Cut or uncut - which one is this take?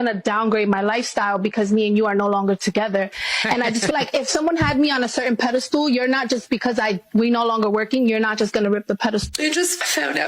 cut